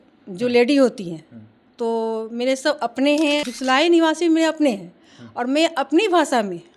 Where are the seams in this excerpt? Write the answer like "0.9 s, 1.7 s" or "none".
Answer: 3.5 s